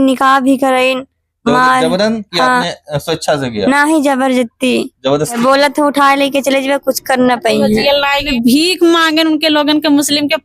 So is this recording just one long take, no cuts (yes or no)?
no